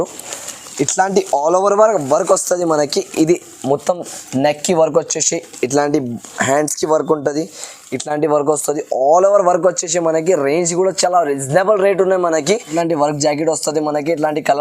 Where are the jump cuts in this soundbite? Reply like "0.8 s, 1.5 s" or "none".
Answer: 12.7 s